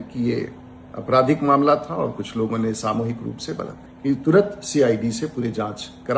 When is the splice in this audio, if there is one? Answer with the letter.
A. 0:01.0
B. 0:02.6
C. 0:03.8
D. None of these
C